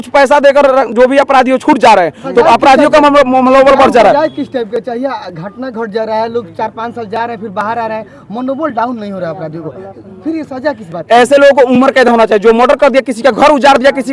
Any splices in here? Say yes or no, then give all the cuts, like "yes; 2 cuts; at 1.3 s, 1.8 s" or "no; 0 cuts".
no; 0 cuts